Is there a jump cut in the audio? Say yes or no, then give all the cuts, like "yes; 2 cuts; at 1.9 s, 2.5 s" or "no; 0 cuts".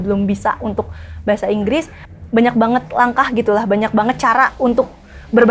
yes; 1 cut; at 2.0 s